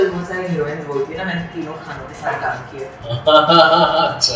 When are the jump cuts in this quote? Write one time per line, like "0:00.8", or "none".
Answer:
none